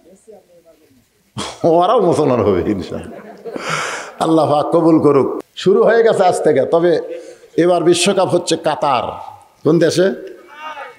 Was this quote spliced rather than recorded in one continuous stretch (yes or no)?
yes